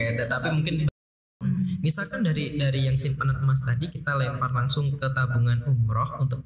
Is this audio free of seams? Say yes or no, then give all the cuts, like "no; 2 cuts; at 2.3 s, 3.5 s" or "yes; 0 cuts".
no; 1 cut; at 1.2 s